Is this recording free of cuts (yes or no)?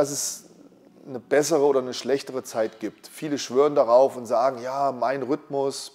yes